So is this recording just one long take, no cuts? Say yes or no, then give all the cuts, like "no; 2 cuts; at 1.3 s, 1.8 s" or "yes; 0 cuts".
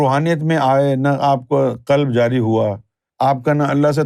yes; 0 cuts